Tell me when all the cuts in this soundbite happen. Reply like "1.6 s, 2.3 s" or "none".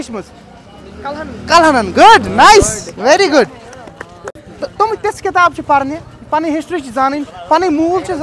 none